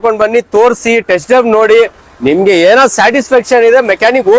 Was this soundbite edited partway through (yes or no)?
no